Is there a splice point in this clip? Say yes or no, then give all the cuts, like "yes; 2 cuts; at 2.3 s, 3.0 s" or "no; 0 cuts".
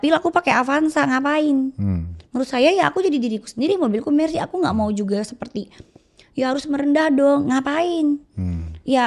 no; 0 cuts